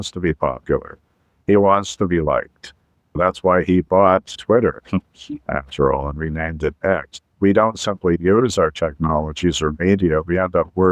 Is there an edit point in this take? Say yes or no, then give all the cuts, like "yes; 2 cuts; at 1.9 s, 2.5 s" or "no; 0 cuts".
yes; 3 cuts; at 3.2 s, 4.3 s, 7.3 s